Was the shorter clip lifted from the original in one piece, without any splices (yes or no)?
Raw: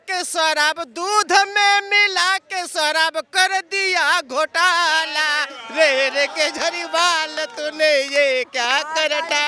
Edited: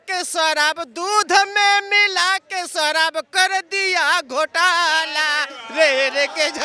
yes